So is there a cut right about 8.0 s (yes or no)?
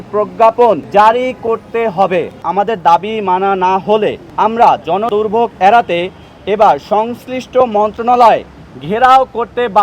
no